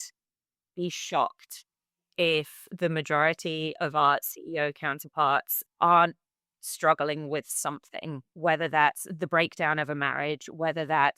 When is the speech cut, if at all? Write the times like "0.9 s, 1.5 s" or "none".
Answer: 5.6 s, 8.3 s